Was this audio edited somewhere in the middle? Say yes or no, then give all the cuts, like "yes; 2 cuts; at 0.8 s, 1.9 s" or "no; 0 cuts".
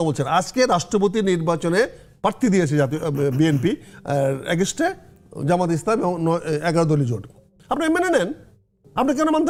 no; 0 cuts